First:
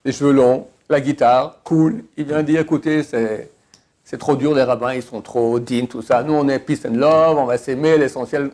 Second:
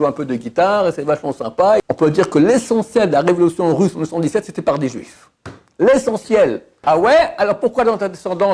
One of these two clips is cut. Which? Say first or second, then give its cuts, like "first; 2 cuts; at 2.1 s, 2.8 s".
second; 2 cuts; at 1.8 s, 6.8 s